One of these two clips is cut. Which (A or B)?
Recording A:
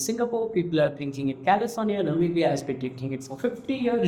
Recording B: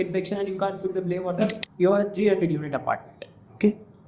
B